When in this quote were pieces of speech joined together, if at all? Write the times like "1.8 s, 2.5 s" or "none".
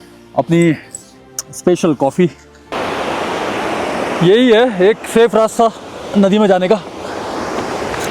2.7 s